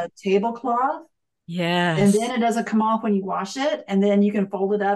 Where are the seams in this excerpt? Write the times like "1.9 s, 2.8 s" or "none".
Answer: none